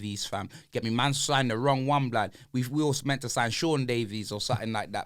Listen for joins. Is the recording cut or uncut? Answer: uncut